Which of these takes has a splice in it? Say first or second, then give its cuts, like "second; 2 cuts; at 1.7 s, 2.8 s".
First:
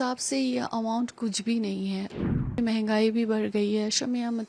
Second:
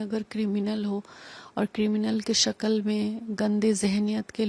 first; 1 cut; at 2.6 s